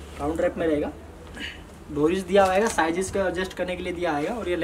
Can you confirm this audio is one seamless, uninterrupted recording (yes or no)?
yes